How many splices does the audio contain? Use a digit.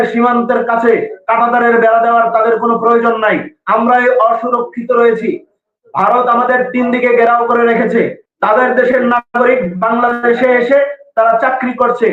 0